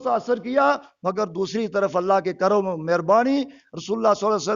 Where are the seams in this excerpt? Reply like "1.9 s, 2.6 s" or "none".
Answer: none